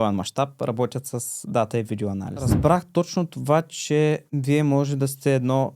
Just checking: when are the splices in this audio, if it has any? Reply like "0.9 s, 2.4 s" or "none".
2.5 s